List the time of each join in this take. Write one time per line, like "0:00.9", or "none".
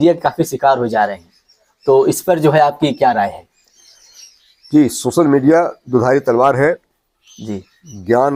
none